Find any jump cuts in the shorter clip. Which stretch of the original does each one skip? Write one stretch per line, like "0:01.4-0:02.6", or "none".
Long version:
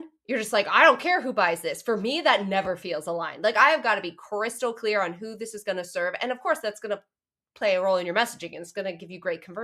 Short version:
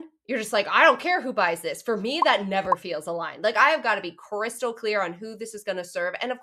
none